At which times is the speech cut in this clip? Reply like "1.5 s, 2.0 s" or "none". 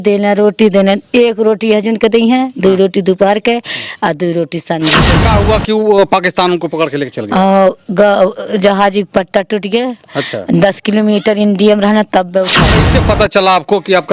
5.2 s, 12.8 s